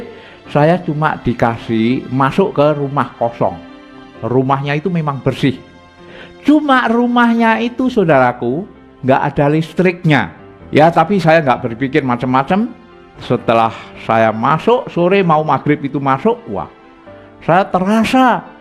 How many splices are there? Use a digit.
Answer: 0